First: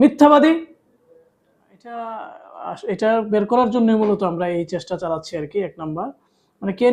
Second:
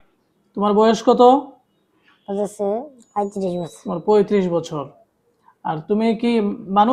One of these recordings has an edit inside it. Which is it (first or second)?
first